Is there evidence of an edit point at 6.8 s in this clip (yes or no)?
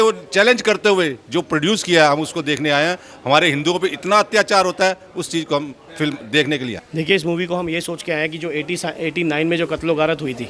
yes